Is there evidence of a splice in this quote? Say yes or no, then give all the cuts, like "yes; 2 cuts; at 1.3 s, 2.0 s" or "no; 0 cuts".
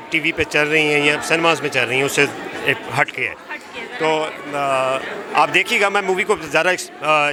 no; 0 cuts